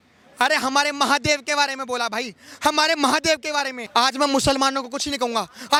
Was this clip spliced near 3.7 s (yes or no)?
no